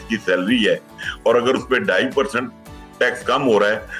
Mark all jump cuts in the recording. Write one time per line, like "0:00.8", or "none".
none